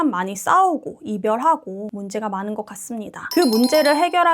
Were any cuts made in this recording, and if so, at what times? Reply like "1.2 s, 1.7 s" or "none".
1.9 s